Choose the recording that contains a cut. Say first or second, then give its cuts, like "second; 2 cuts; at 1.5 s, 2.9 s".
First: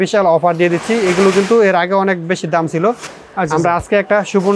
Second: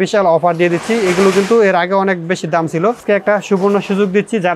second; 1 cut; at 3.0 s